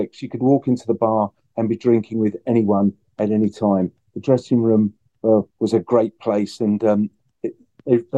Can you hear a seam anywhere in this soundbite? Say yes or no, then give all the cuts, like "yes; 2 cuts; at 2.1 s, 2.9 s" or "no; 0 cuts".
no; 0 cuts